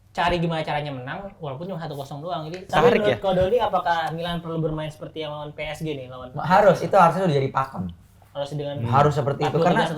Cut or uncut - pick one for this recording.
cut